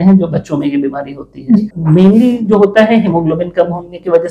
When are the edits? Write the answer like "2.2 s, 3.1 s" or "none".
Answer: 1.7 s